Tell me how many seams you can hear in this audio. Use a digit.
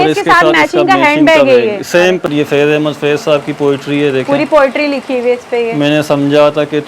1